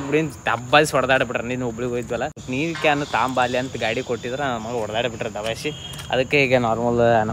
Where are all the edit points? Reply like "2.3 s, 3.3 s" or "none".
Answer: none